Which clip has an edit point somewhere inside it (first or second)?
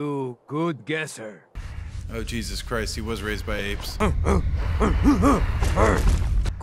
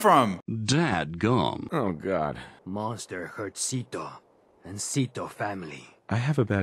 first